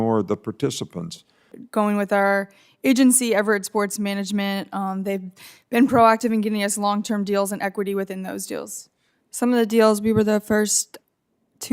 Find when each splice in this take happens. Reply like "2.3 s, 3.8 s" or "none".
1.5 s